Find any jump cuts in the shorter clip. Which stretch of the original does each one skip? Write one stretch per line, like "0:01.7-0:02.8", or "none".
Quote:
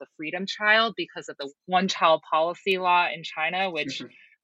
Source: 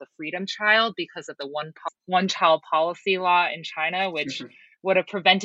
0:01.4-0:01.8